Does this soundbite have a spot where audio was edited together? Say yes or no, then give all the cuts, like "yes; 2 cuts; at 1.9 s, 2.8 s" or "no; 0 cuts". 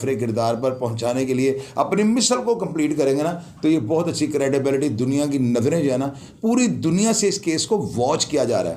no; 0 cuts